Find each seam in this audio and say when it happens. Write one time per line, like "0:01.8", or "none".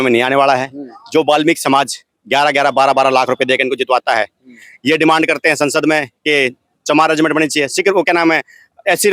none